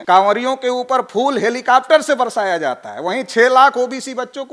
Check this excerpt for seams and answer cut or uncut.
uncut